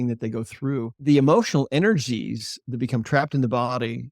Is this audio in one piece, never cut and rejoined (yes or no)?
no